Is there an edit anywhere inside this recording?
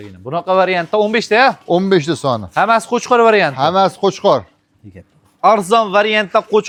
no; 0 cuts

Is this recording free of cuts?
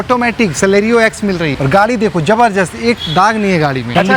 yes; 0 cuts

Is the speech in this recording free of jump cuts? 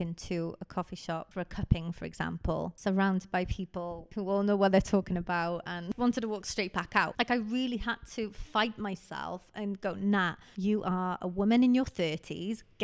no; 6 cuts; at 1.3 s, 2.8 s, 4.0 s, 5.9 s, 7.1 s, 10.4 s

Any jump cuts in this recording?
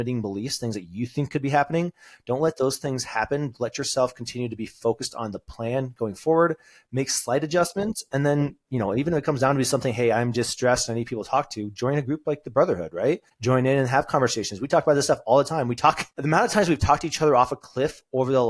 yes; 2 cuts; at 13.3 s, 16.1 s

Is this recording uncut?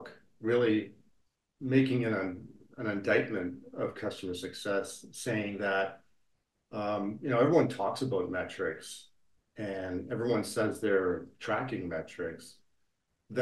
yes; 0 cuts

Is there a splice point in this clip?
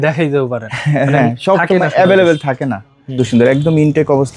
yes; 1 cut; at 3.2 s

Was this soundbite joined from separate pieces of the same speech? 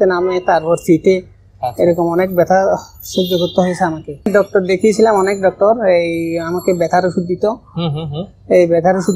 yes; 1 cut; at 4.3 s

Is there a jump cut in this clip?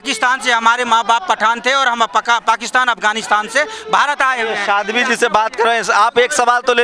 no; 0 cuts

